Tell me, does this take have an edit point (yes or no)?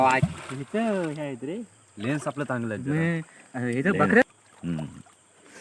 yes